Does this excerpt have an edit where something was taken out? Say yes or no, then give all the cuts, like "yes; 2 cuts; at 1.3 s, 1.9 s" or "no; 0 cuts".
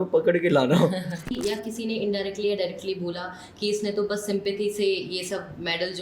yes; 1 cut; at 1.3 s